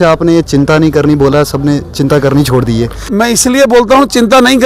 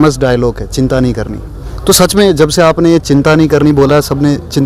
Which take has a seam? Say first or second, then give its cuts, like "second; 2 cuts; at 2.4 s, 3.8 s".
first; 1 cut; at 3.1 s